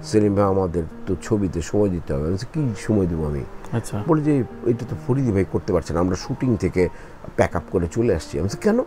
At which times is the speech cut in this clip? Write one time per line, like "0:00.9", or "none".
none